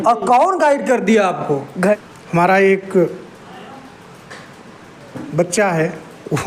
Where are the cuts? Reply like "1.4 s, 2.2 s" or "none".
2.0 s